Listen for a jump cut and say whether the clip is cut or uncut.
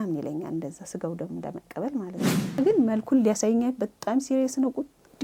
cut